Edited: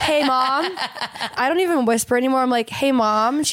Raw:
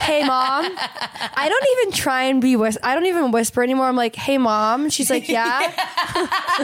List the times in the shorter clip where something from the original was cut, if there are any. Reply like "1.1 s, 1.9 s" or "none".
1.3 s